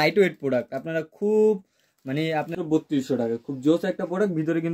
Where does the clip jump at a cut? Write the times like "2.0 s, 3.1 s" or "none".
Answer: 2.5 s